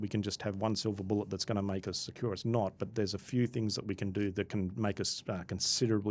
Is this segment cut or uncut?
uncut